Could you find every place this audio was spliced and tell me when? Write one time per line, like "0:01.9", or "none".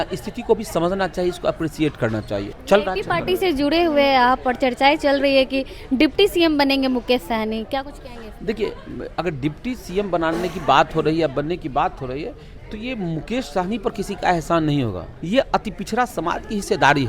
0:02.5
0:15.1